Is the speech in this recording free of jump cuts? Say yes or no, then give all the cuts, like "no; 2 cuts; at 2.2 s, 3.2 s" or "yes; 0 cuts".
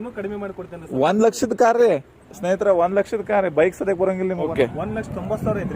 no; 1 cut; at 4.5 s